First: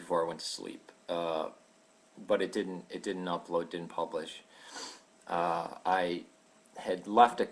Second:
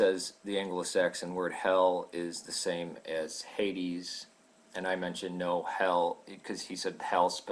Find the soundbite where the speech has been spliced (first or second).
first